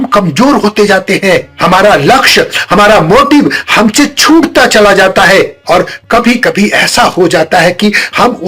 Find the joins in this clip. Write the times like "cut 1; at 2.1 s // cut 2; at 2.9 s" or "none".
none